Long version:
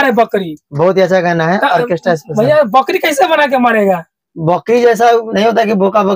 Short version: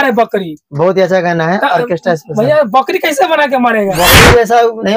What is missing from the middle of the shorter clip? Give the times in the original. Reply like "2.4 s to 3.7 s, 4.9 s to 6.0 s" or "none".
3.9 s to 4.4 s